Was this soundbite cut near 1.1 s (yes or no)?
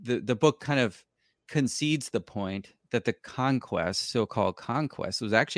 no